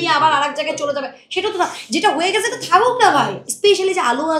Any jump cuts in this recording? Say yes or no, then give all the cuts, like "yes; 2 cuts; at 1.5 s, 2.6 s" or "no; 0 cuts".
yes; 1 cut; at 3.4 s